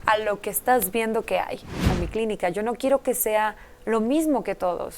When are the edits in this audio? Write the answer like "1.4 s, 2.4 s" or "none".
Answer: 1.9 s